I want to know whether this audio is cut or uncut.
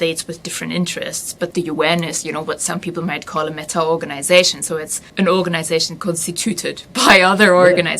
cut